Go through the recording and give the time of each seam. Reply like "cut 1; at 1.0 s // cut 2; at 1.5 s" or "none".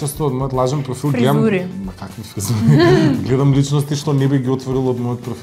none